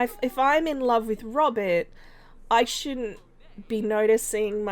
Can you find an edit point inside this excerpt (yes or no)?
no